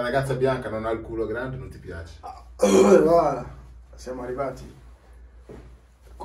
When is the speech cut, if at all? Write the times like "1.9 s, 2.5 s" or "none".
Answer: none